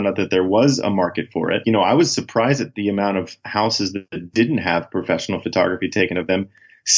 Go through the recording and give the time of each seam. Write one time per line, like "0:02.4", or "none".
0:01.6

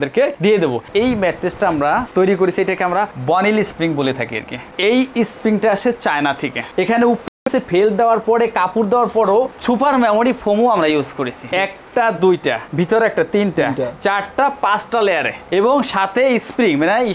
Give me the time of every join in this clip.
0:00.8
0:06.6
0:11.4

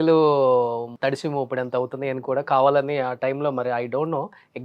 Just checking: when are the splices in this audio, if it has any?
0:00.9

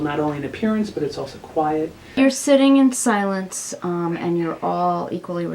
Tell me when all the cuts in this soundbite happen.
0:02.0

